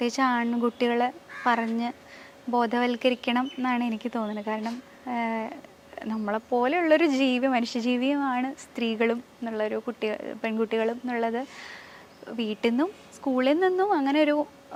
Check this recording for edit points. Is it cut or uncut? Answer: uncut